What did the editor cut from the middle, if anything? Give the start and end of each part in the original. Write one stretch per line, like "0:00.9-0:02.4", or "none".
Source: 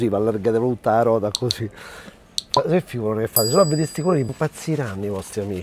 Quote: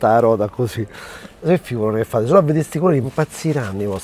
0:02.3-0:02.7